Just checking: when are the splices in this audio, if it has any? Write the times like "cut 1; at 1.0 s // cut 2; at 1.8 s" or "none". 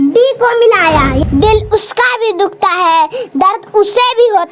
cut 1; at 1.2 s